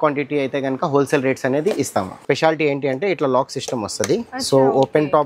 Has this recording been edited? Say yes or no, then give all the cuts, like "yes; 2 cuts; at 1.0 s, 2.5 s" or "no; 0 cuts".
yes; 1 cut; at 2.2 s